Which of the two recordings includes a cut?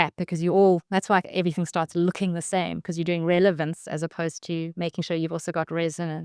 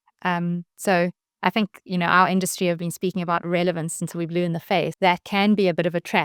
second; 1 cut; at 4.9 s

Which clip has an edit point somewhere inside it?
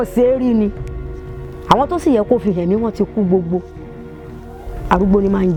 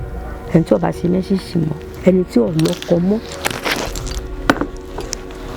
second; 1 cut; at 1.8 s

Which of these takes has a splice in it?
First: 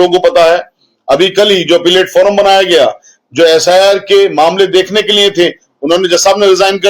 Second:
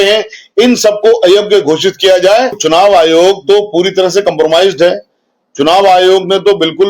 second; 1 cut; at 2.6 s

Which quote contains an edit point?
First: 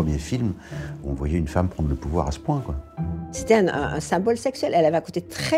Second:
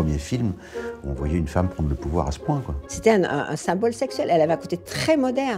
second; 1 cut; at 2.8 s

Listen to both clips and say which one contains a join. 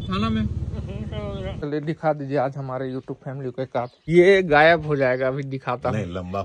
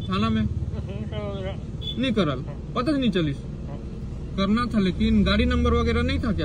first; 2 cuts; at 1.6 s, 4.1 s

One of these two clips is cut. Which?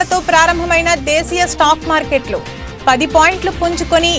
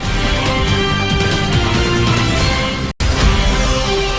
second; 1 cut; at 2.9 s

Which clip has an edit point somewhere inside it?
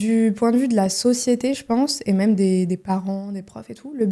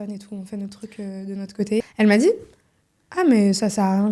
second; 1 cut; at 1.8 s

